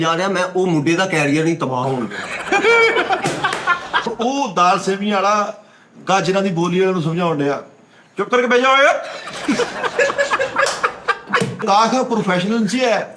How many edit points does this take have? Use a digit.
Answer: 2